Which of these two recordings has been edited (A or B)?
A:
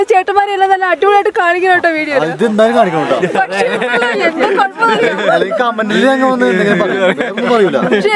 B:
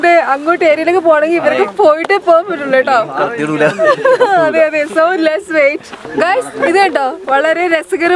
B